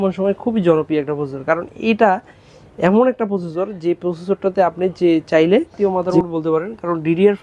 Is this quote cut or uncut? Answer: cut